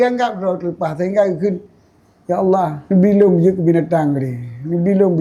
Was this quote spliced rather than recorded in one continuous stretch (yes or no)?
yes